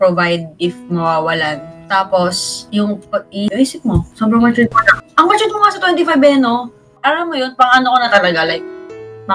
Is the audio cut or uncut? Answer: cut